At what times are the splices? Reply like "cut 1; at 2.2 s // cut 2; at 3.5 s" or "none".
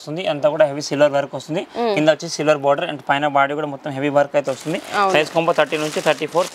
none

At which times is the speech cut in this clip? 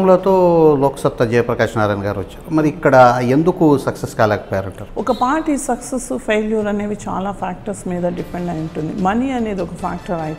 cut 1; at 4.8 s

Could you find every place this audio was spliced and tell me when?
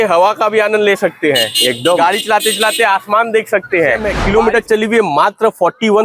cut 1; at 4.1 s

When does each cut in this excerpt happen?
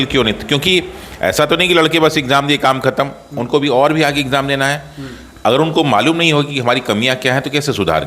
none

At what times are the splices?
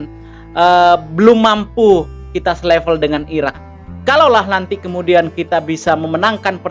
cut 1; at 3.7 s

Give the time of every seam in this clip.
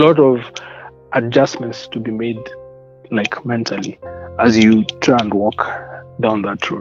none

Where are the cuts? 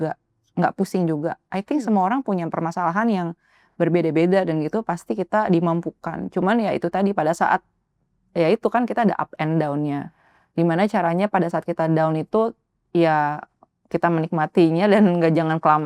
none

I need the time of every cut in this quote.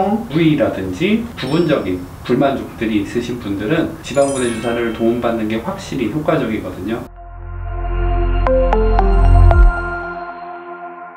cut 1; at 1.3 s // cut 2; at 4.0 s // cut 3; at 7.1 s

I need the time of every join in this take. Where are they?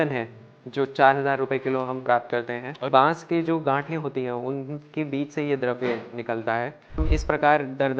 cut 1; at 2.9 s // cut 2; at 7.0 s

